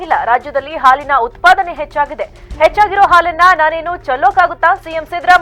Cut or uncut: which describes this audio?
uncut